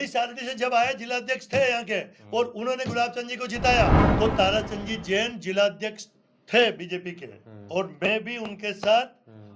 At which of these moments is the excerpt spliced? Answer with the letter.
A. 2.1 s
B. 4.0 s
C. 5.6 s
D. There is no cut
B